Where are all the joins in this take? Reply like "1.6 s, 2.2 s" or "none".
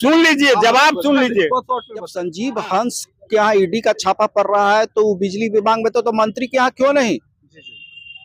1.6 s